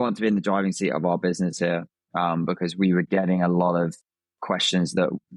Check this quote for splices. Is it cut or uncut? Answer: uncut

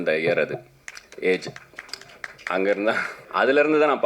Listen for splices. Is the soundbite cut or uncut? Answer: cut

